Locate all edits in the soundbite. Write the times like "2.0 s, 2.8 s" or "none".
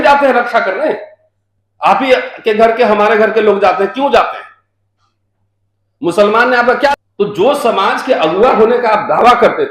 6.9 s